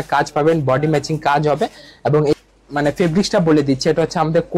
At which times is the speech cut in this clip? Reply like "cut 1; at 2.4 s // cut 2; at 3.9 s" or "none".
cut 1; at 2.3 s